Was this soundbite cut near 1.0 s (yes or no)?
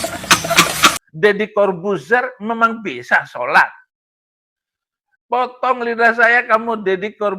yes